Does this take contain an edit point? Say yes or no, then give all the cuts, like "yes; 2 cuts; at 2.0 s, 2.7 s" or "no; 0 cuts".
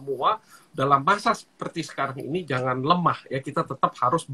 no; 0 cuts